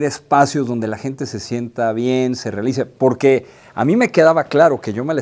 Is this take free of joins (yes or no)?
yes